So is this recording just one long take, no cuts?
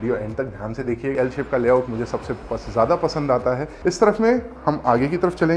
no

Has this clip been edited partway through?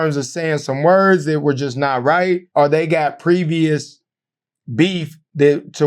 yes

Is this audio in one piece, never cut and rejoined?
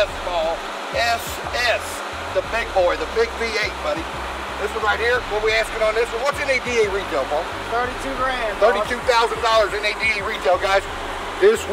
yes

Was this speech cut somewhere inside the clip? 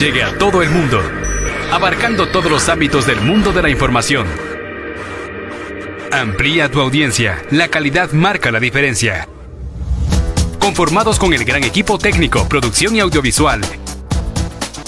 no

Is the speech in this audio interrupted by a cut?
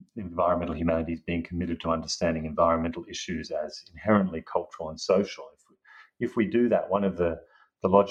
no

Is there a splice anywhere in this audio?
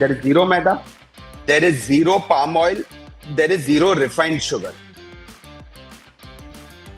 no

